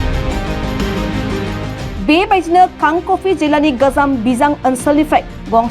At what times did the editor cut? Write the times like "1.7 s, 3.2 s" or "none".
1.9 s

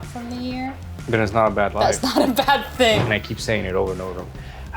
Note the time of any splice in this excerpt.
3.1 s

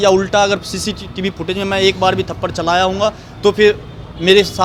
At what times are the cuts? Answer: none

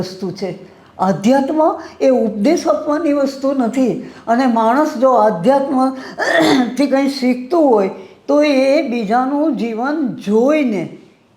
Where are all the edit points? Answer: none

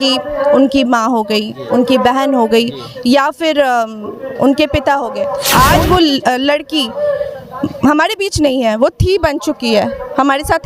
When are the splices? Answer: 5.4 s

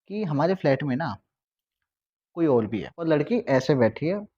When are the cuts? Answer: 2.8 s

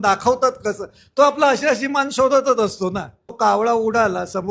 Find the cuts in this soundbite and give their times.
2.7 s

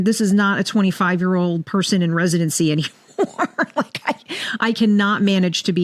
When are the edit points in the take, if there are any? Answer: none

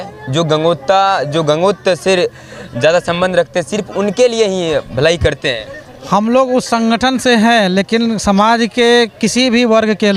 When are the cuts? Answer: none

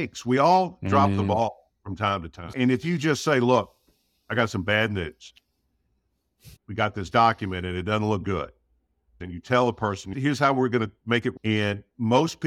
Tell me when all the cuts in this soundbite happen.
2.5 s, 6.7 s, 9.2 s, 10.1 s

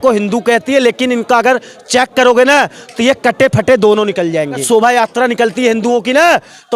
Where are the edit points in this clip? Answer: 4.6 s

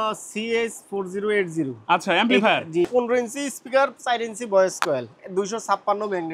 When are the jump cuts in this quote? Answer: 2.9 s

